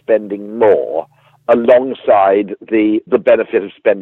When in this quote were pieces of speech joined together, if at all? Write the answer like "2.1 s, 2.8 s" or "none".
3.0 s